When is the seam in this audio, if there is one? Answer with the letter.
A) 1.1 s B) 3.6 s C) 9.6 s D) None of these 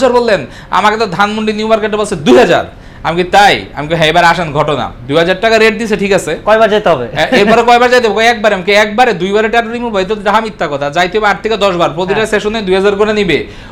D